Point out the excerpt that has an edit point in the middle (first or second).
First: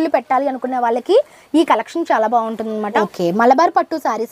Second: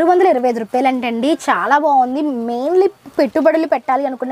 first